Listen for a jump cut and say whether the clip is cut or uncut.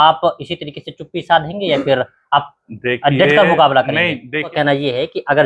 cut